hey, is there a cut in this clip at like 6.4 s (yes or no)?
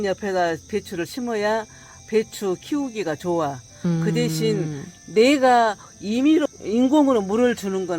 yes